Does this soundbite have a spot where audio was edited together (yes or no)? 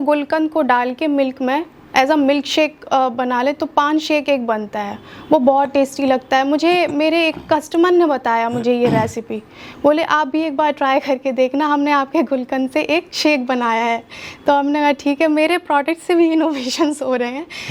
no